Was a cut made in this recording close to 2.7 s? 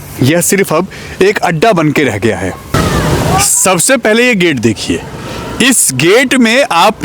yes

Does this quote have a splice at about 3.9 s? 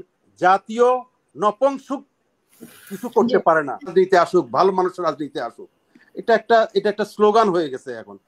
yes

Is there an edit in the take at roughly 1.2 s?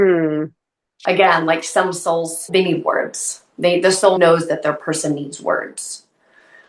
no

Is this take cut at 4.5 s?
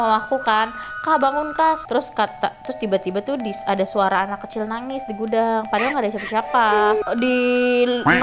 no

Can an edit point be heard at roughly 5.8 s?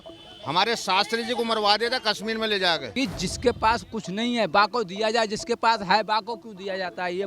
no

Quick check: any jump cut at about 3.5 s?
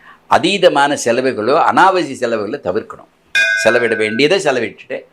yes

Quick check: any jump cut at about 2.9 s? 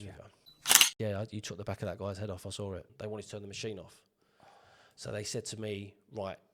yes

